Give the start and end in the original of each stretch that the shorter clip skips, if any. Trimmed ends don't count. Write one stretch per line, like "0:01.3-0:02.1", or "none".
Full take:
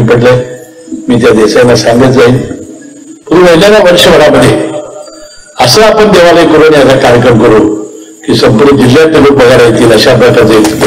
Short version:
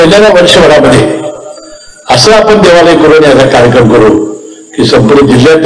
none